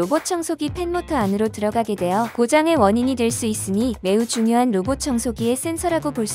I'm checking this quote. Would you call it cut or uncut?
cut